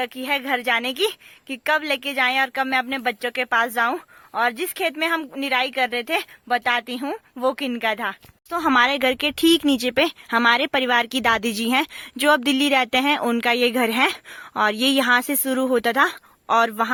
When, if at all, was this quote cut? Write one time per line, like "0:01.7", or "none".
none